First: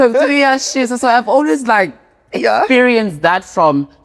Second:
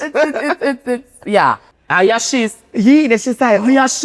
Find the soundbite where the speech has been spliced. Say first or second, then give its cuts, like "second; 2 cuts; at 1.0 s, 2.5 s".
second; 1 cut; at 1.7 s